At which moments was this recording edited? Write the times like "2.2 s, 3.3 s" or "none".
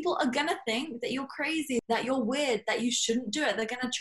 1.8 s